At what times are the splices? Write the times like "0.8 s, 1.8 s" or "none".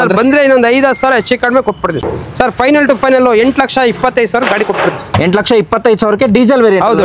2.1 s